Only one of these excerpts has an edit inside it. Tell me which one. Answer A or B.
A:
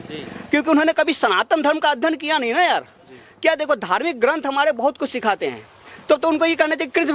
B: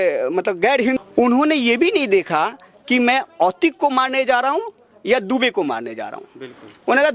B